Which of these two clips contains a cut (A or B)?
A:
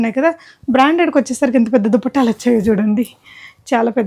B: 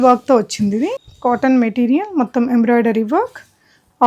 B